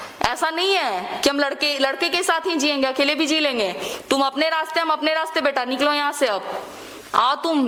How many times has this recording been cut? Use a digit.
0